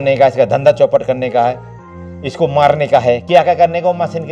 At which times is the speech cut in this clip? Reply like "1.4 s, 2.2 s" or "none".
none